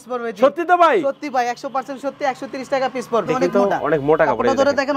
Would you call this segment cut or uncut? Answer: cut